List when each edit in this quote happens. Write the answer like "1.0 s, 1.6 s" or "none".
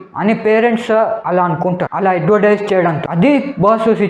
none